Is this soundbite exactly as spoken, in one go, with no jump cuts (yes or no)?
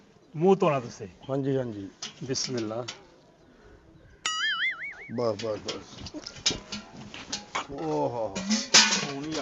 yes